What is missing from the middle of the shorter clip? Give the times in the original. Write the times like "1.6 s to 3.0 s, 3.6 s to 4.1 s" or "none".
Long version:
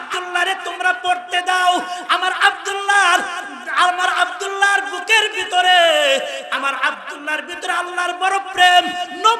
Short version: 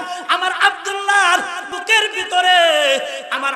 3.5 s to 4.9 s